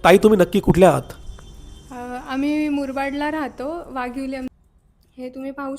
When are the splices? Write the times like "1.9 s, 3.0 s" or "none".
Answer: 4.5 s